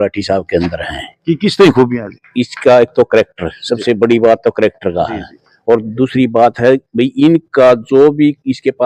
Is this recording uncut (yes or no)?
yes